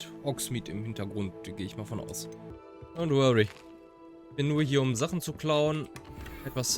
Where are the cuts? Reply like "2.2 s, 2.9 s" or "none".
2.5 s